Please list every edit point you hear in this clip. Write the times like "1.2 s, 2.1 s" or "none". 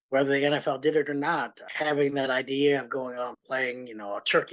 1.6 s